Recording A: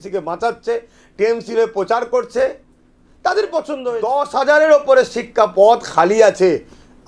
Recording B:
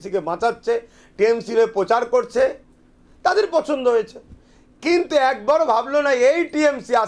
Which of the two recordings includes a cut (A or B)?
A